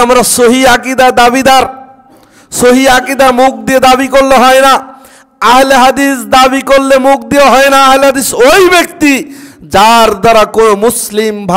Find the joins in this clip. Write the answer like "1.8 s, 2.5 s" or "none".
none

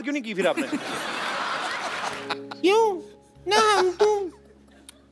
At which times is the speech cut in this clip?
1.7 s

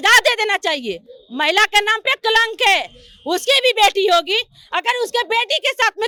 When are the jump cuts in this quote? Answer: none

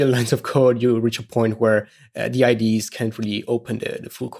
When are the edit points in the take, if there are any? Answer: none

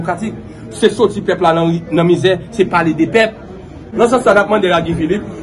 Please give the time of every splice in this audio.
3.9 s

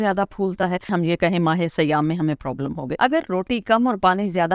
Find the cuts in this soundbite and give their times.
0.9 s, 2.9 s

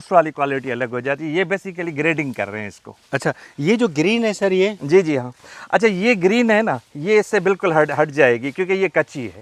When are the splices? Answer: none

